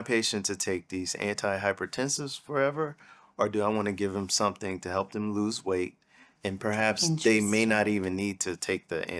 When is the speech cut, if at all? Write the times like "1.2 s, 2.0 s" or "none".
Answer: none